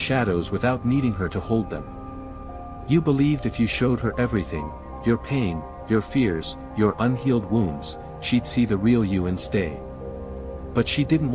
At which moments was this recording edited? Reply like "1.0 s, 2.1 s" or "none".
none